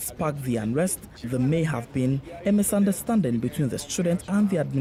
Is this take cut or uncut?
uncut